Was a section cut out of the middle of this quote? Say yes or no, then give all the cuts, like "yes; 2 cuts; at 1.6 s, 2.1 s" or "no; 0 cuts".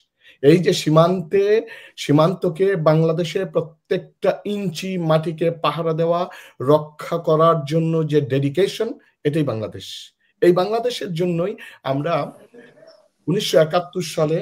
no; 0 cuts